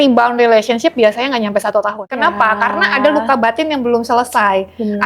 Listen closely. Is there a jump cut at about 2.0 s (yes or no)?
yes